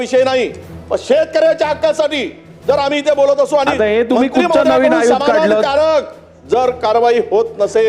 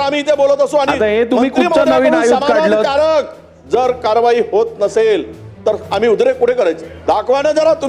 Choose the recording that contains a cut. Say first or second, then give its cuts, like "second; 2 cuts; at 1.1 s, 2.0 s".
second; 1 cut; at 6.9 s